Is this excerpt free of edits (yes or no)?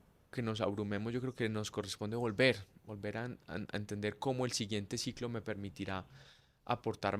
yes